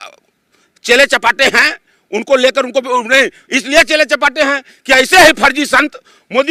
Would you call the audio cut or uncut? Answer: uncut